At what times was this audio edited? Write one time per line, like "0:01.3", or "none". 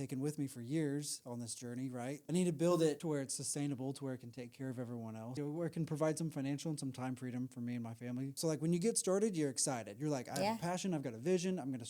0:02.2
0:03.0
0:05.3
0:08.4